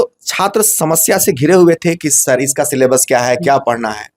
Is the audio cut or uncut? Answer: uncut